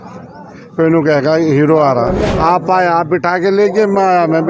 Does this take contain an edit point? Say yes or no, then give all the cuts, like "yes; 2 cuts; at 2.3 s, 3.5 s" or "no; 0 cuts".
yes; 1 cut; at 2.3 s